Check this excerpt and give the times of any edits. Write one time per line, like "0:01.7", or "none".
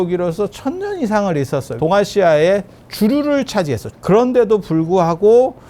0:01.7
0:03.9